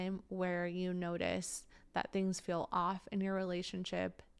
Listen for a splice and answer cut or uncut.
uncut